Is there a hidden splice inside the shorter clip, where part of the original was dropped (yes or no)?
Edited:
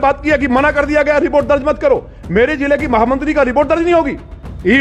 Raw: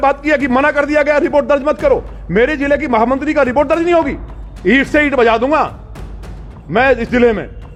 no